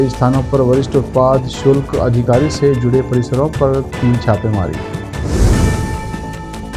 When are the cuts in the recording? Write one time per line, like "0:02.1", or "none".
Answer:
none